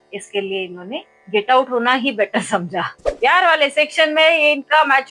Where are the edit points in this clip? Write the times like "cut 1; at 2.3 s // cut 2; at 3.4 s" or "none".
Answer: cut 1; at 3.0 s